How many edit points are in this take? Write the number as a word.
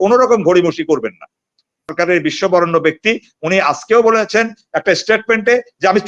one